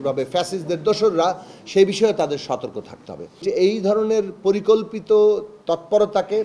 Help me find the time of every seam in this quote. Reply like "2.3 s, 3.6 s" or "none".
3.4 s